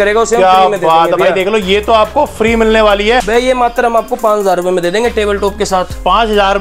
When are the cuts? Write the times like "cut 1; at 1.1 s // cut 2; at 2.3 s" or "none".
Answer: cut 1; at 3.3 s